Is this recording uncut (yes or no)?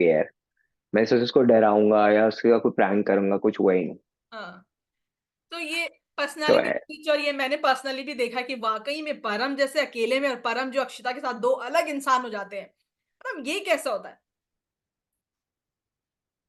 yes